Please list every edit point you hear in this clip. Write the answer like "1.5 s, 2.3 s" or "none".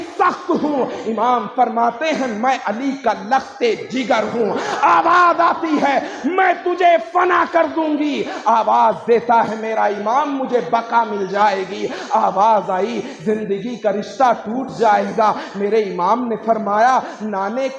none

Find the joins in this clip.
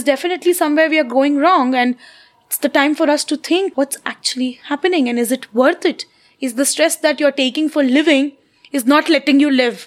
3.7 s

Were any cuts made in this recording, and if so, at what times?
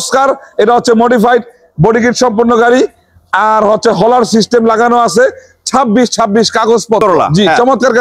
7.0 s

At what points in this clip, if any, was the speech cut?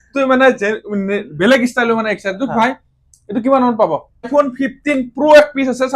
4.3 s

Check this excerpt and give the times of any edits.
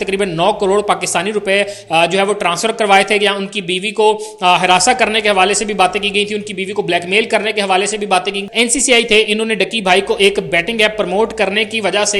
8.4 s

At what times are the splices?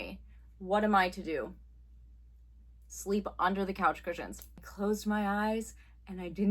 4.5 s

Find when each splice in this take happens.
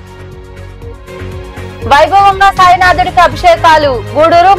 none

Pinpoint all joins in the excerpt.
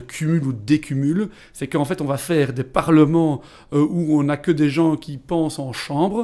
none

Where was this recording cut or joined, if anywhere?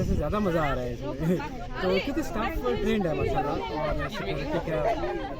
none

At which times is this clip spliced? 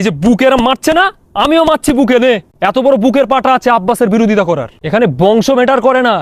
2.5 s, 4.7 s

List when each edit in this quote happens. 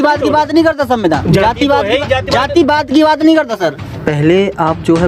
3.9 s

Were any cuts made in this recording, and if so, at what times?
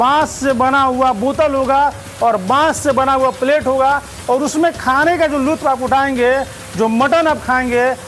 none

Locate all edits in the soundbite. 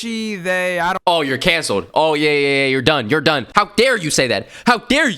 3.5 s

